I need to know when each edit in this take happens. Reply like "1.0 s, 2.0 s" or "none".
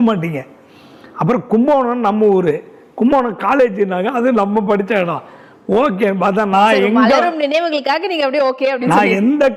none